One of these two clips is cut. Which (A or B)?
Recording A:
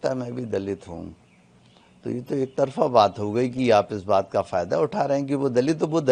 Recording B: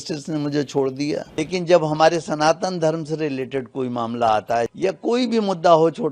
B